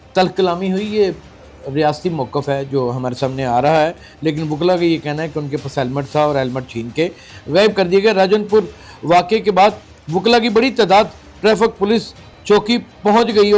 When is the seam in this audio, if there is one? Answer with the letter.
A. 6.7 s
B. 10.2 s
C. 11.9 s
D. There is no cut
D